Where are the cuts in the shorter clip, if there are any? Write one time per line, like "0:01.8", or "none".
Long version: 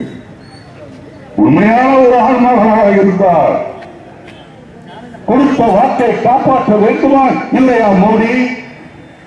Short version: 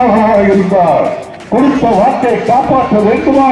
0:01.3